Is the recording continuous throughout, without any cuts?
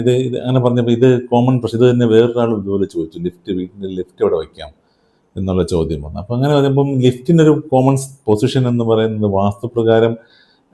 yes; 0 cuts

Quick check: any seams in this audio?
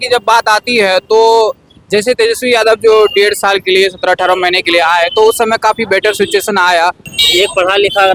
yes; 1 cut; at 7.1 s

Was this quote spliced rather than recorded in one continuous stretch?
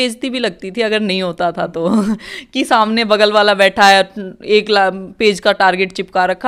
no; 0 cuts

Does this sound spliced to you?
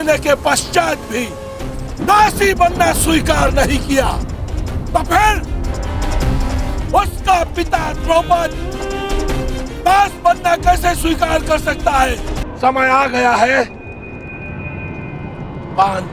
yes; 1 cut; at 12.4 s

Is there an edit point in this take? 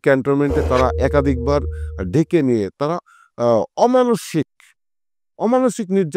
no; 0 cuts

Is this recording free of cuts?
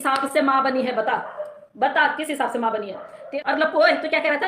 no; 1 cut; at 3.3 s

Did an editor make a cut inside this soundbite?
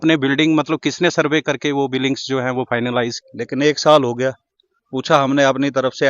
yes; 1 cut; at 3.2 s

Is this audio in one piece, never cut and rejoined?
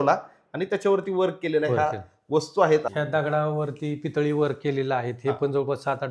no; 1 cut; at 2.8 s

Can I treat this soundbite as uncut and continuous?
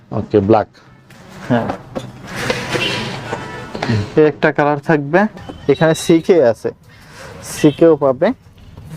no; 1 cut; at 5.4 s

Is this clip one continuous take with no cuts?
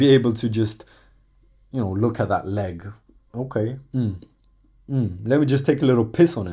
yes; 0 cuts

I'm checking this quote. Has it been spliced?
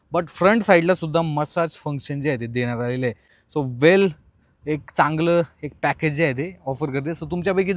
no; 0 cuts

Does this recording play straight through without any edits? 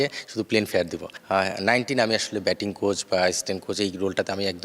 no; 1 cut; at 1.1 s

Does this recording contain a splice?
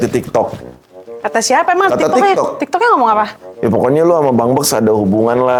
no; 0 cuts

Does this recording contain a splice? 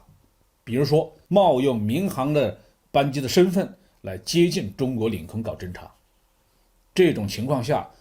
yes; 1 cut; at 1.2 s

